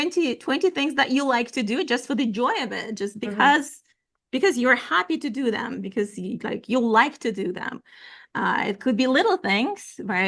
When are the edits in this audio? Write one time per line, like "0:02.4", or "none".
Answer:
none